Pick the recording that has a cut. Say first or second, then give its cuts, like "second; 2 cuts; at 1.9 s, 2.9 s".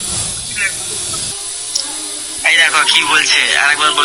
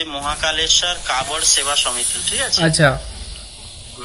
first; 1 cut; at 1.3 s